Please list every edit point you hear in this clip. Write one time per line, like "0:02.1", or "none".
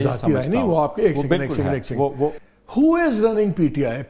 0:02.5